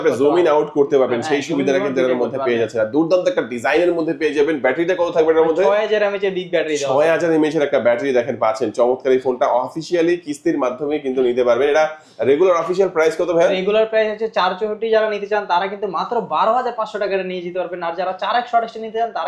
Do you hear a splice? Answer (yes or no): no